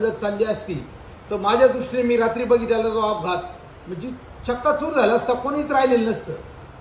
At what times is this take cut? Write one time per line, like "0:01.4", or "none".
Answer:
none